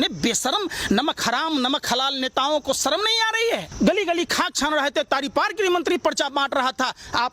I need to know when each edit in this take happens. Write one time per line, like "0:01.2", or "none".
0:03.7